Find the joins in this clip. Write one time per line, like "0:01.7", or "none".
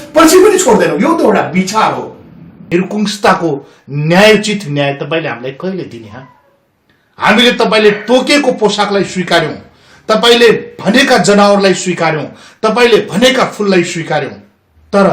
0:02.7